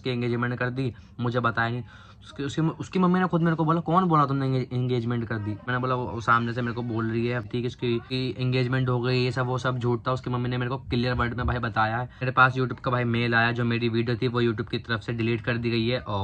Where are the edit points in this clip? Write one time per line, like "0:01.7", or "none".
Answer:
0:07.5
0:12.2